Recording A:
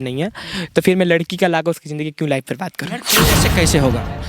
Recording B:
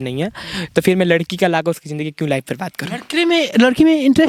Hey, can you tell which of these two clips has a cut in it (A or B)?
A